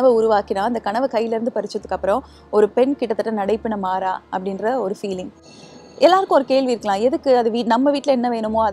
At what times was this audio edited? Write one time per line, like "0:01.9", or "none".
none